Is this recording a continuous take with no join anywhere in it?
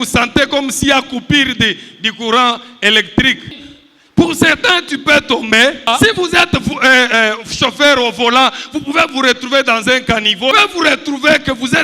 no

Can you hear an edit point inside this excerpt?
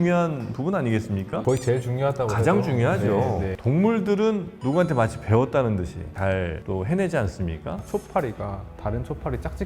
yes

